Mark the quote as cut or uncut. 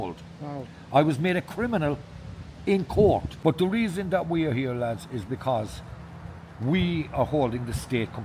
cut